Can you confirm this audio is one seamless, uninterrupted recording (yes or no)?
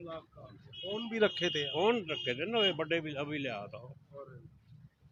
yes